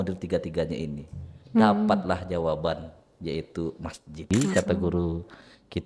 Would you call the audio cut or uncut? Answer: cut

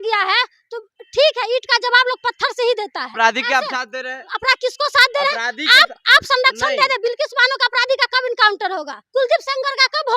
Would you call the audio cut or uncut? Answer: cut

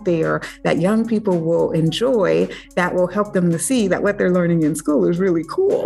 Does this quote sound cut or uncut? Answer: uncut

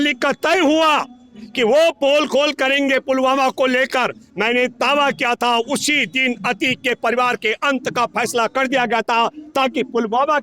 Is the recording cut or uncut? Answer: uncut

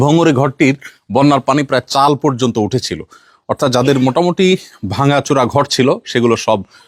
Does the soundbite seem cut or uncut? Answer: uncut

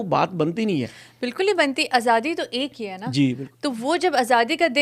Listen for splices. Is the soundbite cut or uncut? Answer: uncut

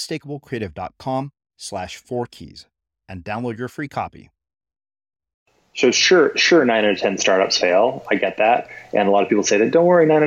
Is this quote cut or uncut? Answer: cut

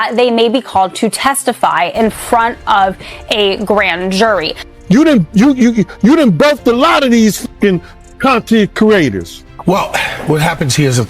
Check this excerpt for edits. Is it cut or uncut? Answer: cut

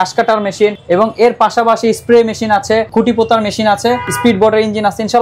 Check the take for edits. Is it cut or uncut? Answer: cut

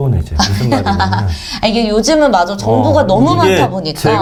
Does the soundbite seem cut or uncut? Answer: uncut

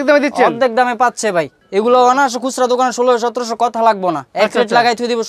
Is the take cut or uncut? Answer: uncut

